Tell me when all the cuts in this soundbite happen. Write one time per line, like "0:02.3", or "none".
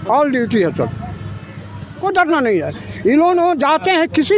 0:02.0